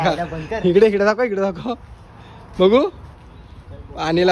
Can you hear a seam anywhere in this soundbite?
no; 0 cuts

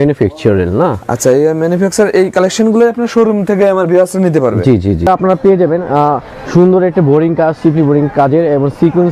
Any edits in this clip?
yes; 1 cut; at 5.1 s

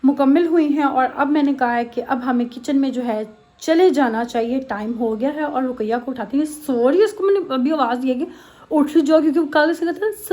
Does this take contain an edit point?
no; 0 cuts

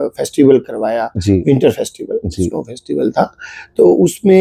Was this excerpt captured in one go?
yes; 0 cuts

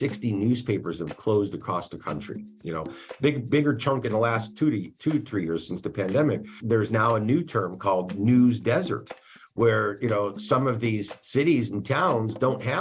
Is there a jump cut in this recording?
yes; 1 cut; at 6.6 s

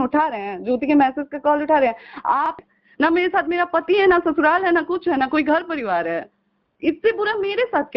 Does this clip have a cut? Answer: yes; 1 cut; at 2.6 s

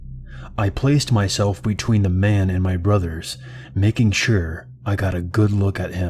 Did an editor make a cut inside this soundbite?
no; 0 cuts

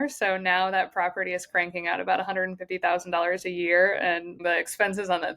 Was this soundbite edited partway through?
yes; 1 cut; at 4.3 s

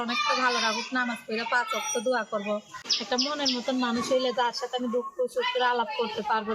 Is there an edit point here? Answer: yes; 1 cut; at 2.7 s

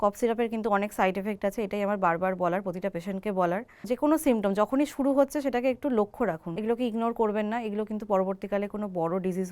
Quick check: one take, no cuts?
no; 2 cuts; at 3.9 s, 6.5 s

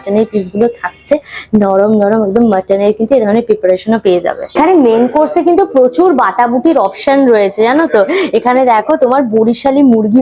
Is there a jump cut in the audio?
no; 0 cuts

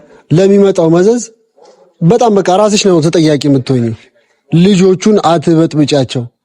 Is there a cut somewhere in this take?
no; 0 cuts

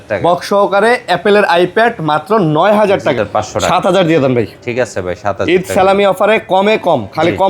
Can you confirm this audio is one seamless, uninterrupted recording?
no; 1 cut; at 3.2 s

